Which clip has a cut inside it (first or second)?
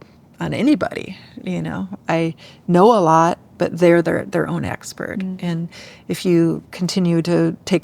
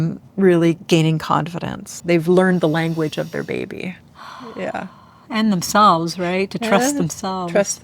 second